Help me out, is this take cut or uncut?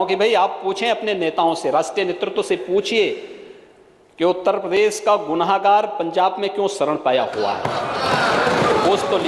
uncut